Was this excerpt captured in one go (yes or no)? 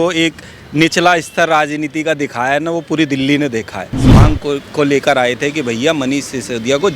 no